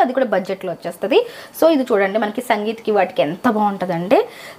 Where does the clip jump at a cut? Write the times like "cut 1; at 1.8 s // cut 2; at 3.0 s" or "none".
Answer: none